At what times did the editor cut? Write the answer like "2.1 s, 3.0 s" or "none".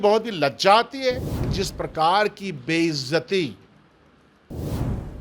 1.6 s

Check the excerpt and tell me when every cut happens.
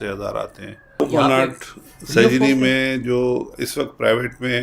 1.0 s

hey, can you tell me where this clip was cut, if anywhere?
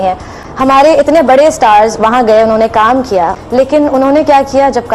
3.4 s

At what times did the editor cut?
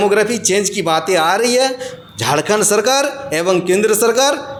none

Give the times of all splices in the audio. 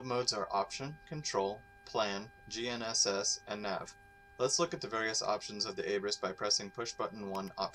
none

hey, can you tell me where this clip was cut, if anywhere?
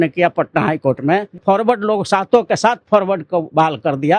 1.3 s

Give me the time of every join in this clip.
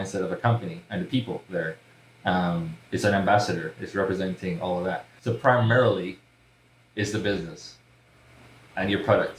5.1 s

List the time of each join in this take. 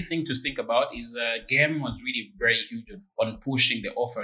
3.0 s

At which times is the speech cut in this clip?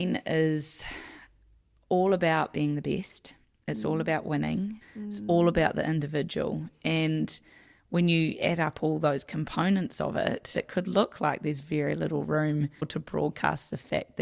4.8 s, 10.5 s, 12.9 s

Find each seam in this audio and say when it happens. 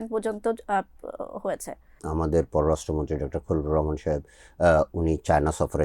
1.9 s

